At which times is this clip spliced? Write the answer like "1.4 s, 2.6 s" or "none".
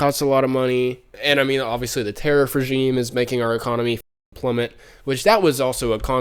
1.1 s